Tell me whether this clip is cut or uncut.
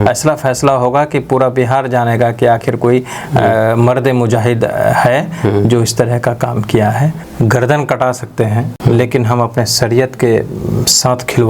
cut